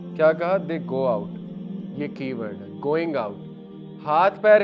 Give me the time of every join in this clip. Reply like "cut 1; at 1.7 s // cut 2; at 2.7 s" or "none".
none